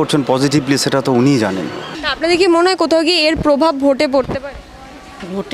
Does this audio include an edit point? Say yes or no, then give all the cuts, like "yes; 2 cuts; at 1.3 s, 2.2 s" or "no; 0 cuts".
yes; 1 cut; at 1.8 s